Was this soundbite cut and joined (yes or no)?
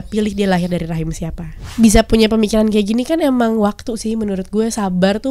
yes